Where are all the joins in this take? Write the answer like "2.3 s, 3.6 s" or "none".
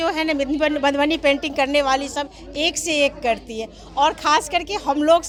none